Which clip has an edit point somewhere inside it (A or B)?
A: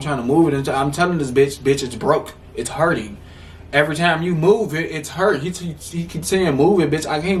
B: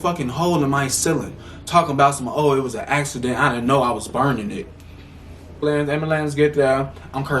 B